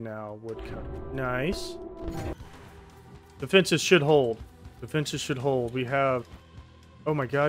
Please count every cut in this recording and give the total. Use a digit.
1